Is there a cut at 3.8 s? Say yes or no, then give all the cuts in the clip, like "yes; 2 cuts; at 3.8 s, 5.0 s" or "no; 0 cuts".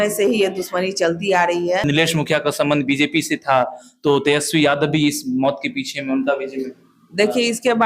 no; 1 cut; at 1.9 s